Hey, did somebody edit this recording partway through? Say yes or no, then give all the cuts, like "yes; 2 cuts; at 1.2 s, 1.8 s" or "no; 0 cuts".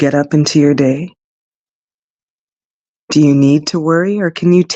no; 0 cuts